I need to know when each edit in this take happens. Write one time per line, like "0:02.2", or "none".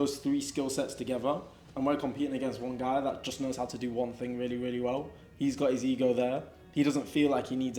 none

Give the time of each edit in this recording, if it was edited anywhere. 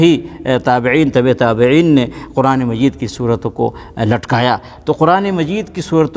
none

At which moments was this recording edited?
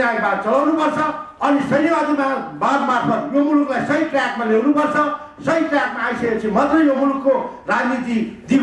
none

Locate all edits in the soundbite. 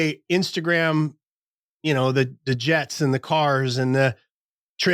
none

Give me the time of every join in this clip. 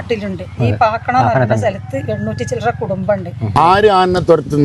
0:03.5

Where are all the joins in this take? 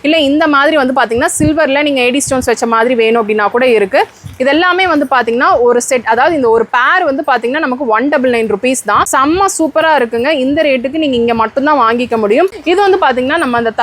0:09.1
0:12.6

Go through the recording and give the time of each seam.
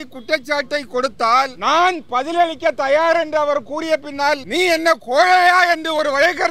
0:01.5
0:04.5

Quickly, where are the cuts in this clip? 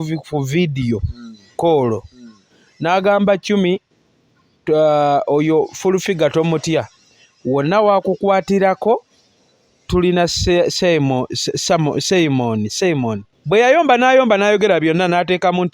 0:13.3

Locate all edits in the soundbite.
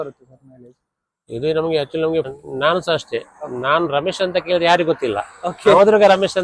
0:02.3

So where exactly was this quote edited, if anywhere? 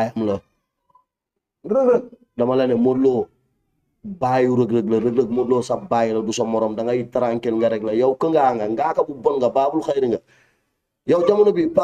none

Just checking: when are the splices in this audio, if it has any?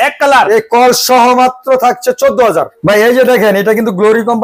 0:02.7

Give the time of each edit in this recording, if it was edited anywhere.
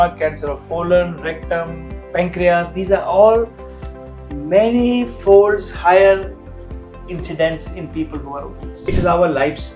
0:08.8

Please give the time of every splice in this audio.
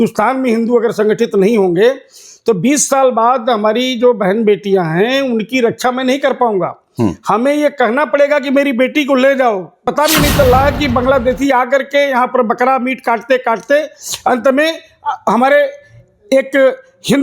0:09.9

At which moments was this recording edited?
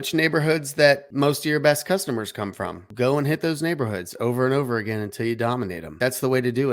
0:01.1
0:02.9
0:06.0

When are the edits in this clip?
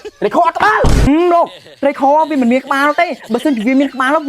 0:01.0

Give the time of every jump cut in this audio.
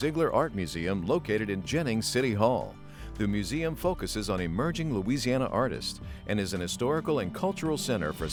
none

